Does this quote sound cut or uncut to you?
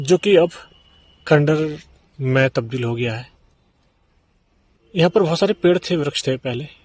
uncut